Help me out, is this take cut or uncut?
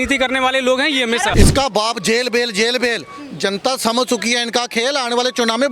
cut